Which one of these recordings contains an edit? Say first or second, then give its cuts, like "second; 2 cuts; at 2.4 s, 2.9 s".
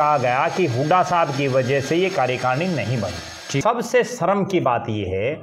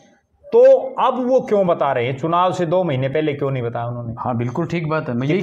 first; 1 cut; at 3.6 s